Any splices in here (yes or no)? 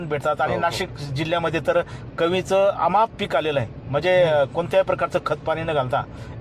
no